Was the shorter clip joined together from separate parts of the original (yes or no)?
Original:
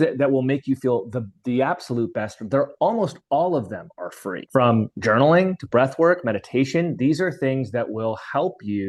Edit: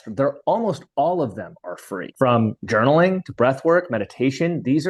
no